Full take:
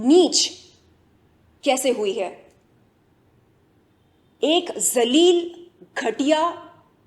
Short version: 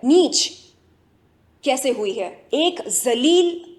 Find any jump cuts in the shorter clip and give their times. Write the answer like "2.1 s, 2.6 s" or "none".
2.4 s